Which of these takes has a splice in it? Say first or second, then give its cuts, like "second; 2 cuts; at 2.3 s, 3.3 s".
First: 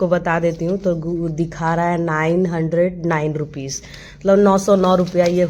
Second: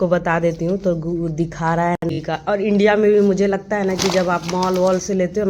second; 1 cut; at 2.0 s